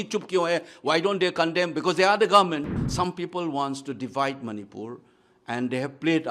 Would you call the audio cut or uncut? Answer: cut